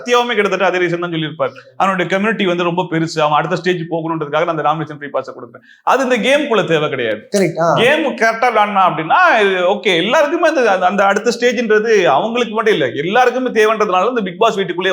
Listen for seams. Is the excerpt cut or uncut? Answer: uncut